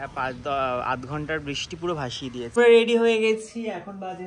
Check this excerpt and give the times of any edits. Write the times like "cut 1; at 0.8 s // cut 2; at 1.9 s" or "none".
cut 1; at 2.5 s